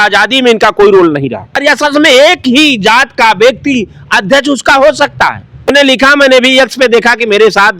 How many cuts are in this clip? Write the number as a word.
two